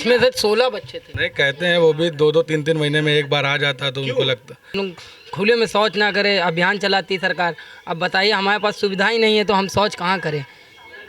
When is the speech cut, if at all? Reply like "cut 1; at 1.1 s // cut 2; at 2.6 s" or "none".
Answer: cut 1; at 1.2 s // cut 2; at 4.7 s